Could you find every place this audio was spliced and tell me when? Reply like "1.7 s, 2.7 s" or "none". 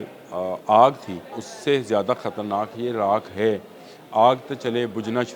1.5 s